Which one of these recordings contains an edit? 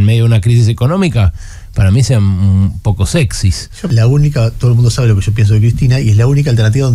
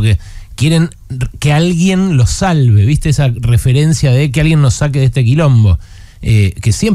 first; 1 cut; at 3.8 s

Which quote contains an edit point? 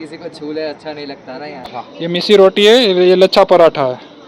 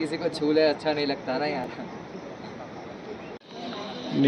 first; 1 cut; at 1.7 s

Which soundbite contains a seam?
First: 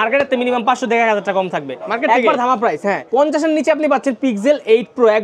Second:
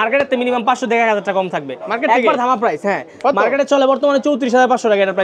first; 1 cut; at 3.0 s

